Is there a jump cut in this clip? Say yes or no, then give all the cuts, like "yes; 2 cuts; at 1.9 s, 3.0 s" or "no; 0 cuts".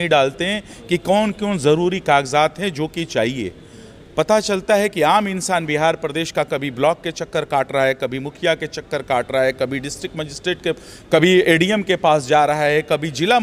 no; 0 cuts